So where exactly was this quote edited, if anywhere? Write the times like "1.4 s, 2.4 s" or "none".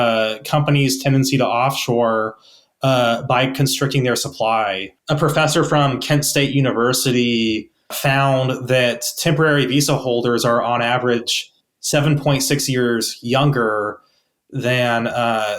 4.9 s, 8.0 s